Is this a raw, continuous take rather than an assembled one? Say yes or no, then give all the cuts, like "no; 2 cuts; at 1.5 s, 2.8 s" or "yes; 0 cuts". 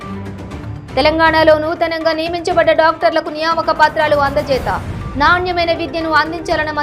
yes; 0 cuts